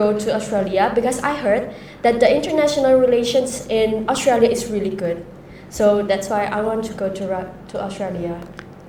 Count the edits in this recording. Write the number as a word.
zero